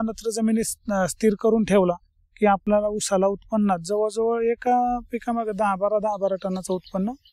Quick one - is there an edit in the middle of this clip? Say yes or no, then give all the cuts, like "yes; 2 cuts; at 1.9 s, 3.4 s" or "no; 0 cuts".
no; 0 cuts